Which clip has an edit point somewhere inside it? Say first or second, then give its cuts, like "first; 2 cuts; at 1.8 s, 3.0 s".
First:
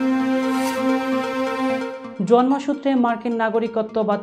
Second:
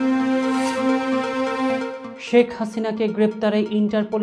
first; 1 cut; at 2.0 s